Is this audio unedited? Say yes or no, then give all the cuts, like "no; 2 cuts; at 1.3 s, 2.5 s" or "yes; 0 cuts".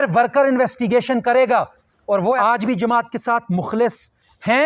no; 1 cut; at 2.4 s